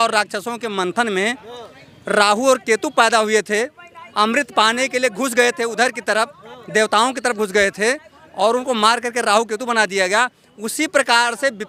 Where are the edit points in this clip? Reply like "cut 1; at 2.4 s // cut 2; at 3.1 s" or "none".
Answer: none

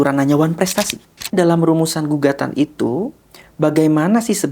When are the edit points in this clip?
cut 1; at 1.3 s

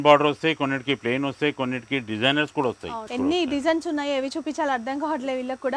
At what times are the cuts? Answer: cut 1; at 3.1 s

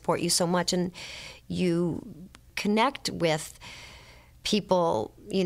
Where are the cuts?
cut 1; at 2.5 s

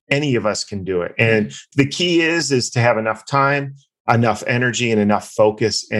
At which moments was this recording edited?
none

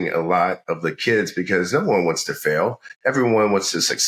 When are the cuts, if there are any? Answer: none

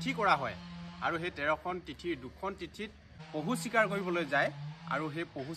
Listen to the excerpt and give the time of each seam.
cut 1; at 2.6 s

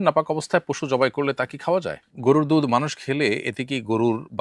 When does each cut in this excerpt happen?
cut 1; at 2.0 s

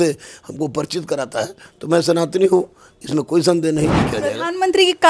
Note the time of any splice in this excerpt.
cut 1; at 4.0 s

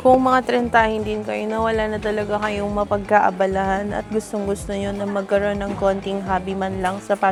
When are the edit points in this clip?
none

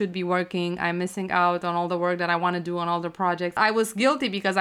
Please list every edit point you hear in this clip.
cut 1; at 3.6 s

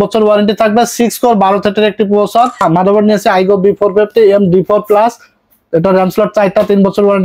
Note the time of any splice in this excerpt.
cut 1; at 2.6 s

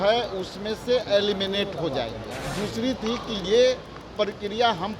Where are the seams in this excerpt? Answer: cut 1; at 2.4 s

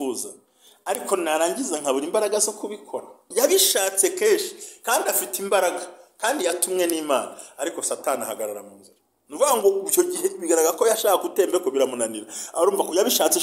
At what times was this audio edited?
cut 1; at 3.2 s

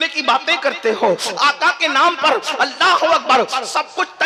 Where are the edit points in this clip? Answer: none

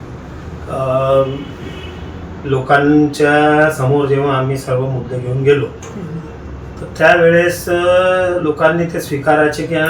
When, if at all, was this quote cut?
none

